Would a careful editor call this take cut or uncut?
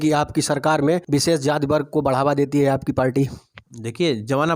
uncut